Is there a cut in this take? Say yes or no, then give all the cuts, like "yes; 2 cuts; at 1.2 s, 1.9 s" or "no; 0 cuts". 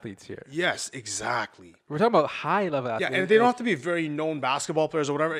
no; 0 cuts